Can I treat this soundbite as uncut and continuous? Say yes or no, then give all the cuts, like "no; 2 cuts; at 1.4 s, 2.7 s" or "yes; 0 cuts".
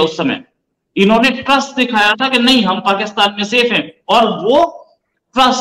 yes; 0 cuts